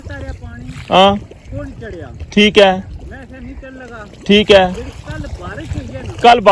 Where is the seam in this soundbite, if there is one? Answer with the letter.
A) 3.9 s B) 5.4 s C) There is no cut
C